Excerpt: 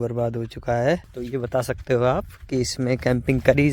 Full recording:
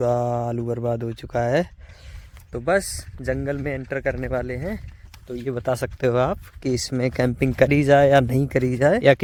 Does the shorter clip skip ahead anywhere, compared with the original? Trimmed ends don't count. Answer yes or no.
yes